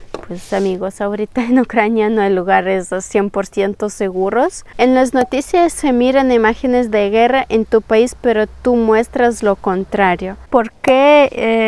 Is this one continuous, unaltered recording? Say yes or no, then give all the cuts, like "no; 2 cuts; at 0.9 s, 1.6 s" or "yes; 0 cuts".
no; 2 cuts; at 4.7 s, 10.5 s